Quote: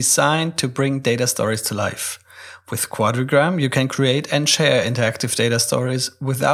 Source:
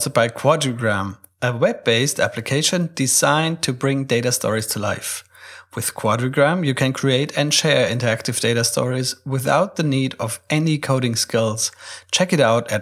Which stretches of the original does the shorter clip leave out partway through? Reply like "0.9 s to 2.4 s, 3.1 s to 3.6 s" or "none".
none